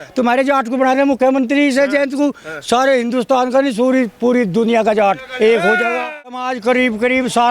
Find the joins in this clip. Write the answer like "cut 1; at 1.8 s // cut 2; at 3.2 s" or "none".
cut 1; at 6.5 s